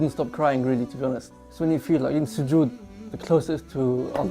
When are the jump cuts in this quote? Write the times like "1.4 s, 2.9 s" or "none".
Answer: 1.4 s